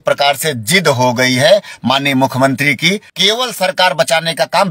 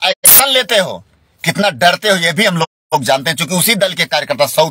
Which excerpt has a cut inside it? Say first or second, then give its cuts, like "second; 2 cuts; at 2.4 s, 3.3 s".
first; 1 cut; at 3.1 s